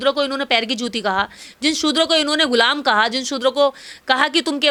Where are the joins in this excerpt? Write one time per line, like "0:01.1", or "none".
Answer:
none